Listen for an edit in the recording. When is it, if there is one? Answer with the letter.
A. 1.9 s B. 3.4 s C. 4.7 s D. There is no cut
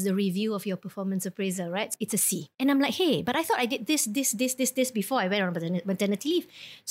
A